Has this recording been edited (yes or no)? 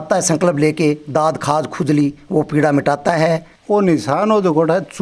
yes